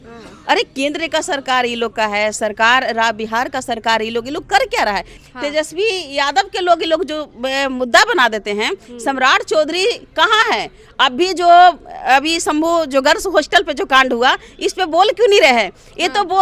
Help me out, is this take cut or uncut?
cut